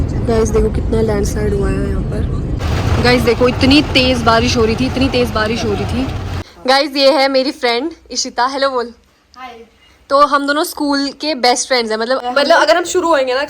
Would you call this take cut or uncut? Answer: cut